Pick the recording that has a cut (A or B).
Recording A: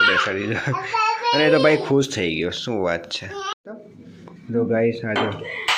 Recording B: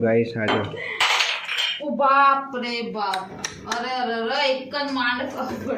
A